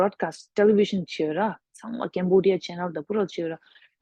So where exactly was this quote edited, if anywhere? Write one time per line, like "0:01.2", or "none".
none